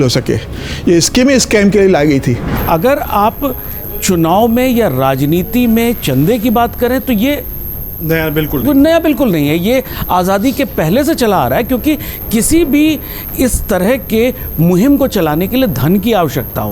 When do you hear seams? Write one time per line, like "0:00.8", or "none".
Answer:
0:02.6